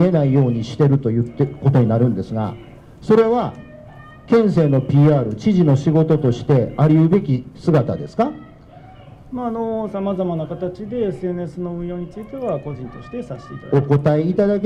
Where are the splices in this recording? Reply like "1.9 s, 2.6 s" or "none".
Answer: none